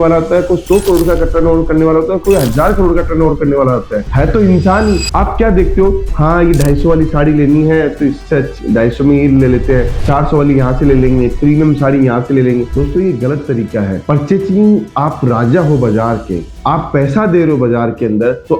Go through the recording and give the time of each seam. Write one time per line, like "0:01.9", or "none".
0:05.1